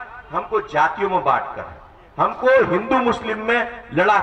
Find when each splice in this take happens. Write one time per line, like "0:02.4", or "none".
none